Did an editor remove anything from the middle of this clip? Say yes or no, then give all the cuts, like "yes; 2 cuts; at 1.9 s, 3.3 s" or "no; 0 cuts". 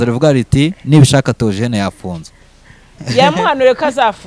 yes; 1 cut; at 3.0 s